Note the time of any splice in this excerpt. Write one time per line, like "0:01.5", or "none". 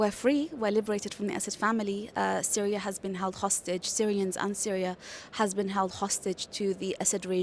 none